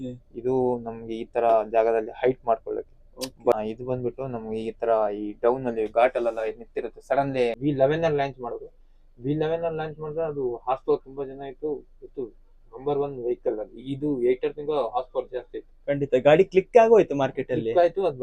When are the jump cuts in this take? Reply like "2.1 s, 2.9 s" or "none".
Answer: 3.5 s, 7.6 s